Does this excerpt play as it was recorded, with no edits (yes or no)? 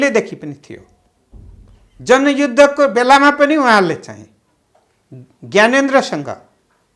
yes